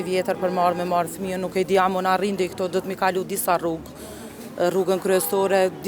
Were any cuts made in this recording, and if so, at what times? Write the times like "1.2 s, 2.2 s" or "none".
none